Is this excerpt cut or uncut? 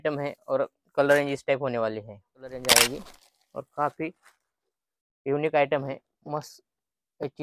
cut